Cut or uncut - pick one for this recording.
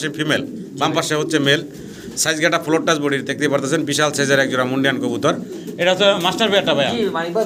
uncut